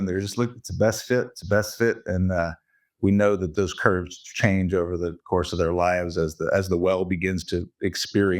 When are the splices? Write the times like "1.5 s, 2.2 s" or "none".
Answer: 3.5 s